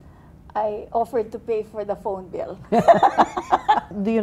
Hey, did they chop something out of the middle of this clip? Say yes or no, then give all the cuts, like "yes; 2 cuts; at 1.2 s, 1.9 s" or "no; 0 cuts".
no; 0 cuts